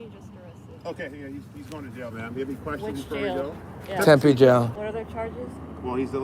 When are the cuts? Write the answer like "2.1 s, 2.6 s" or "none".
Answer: 4.7 s